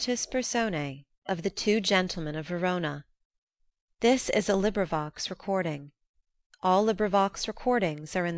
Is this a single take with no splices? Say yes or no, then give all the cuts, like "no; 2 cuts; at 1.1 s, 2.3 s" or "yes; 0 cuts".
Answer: no; 1 cut; at 1.1 s